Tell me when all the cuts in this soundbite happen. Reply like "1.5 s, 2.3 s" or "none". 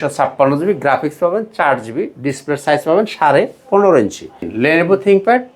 4.5 s